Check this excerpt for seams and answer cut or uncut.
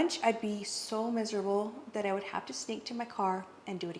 uncut